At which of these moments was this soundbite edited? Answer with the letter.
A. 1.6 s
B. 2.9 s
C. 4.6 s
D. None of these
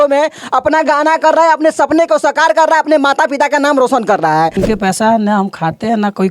C